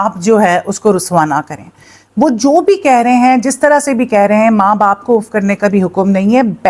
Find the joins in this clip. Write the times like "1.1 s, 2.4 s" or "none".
none

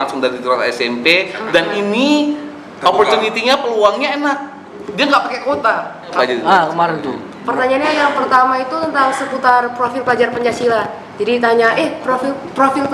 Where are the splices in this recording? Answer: 6.1 s

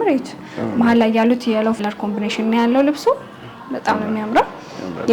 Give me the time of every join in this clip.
1.8 s

